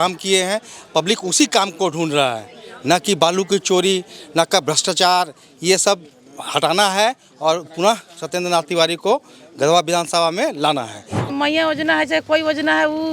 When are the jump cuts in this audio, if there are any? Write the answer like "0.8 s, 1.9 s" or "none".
11.3 s